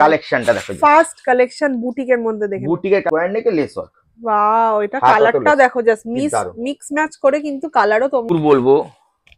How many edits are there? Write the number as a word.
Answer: two